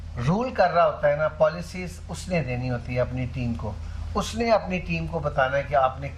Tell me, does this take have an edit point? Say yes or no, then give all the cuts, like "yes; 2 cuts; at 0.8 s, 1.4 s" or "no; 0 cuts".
no; 0 cuts